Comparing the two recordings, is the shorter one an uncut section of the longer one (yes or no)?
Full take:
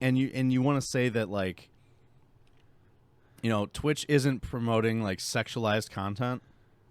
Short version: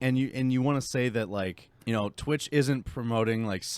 no